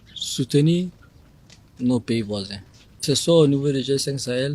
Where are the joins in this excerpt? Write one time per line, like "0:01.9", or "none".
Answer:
0:03.0